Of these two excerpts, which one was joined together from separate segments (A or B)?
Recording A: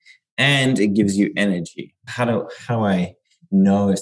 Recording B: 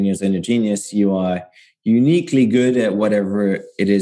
A